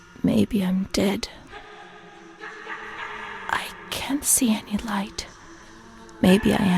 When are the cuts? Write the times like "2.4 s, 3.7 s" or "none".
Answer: none